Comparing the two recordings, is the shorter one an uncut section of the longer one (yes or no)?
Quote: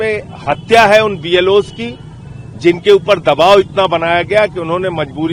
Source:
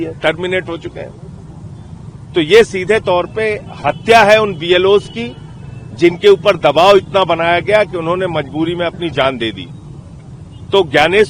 yes